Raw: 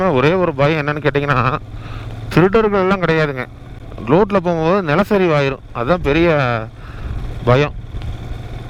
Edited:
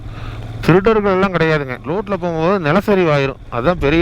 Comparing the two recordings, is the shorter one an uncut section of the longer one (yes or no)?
no